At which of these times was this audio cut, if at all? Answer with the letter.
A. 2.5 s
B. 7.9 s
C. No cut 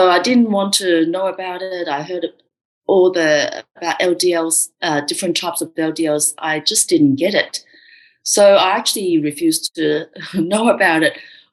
C